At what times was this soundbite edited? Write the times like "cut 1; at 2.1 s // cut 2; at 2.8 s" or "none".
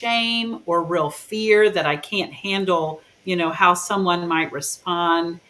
none